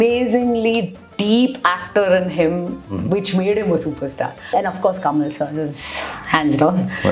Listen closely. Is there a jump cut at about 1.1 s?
no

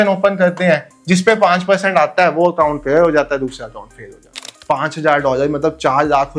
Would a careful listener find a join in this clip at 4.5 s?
yes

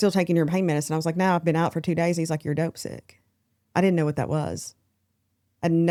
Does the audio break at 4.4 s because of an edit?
no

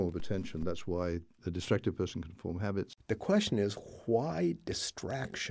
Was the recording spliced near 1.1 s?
no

